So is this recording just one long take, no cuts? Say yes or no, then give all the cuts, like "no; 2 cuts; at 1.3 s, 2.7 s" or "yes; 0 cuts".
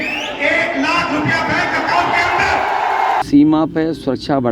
no; 1 cut; at 3.2 s